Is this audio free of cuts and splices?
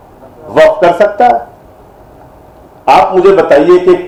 yes; 0 cuts

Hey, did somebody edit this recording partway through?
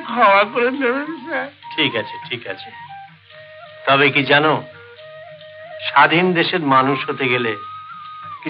no; 0 cuts

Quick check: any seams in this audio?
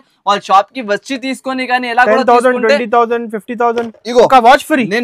no; 0 cuts

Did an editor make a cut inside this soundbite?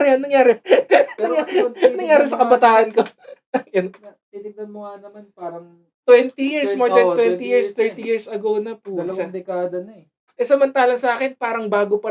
no; 0 cuts

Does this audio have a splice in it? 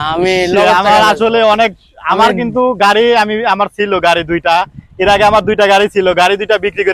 no; 0 cuts

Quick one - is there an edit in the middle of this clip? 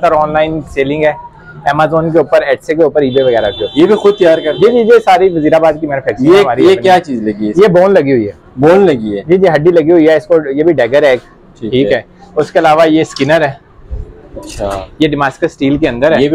no; 0 cuts

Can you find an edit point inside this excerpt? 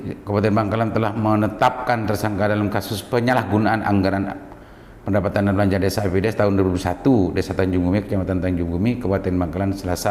no; 0 cuts

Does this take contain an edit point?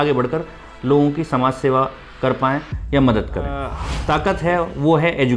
yes; 1 cut; at 3.9 s

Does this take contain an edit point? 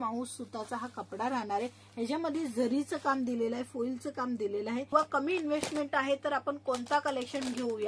yes; 1 cut; at 4.9 s

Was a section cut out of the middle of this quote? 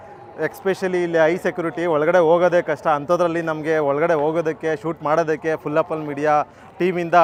no; 0 cuts

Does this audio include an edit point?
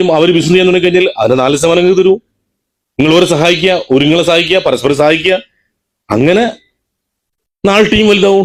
no; 0 cuts

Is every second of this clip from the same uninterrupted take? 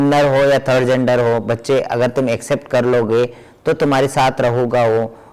yes; 0 cuts

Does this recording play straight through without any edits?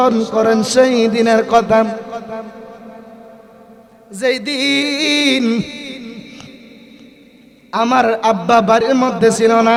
yes; 0 cuts

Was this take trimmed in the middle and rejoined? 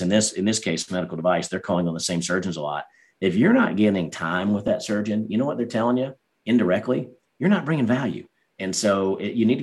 no; 0 cuts

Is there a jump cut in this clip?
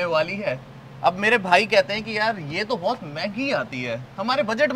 no; 0 cuts

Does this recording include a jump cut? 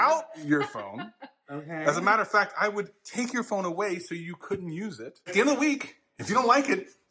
yes; 1 cut; at 5.3 s

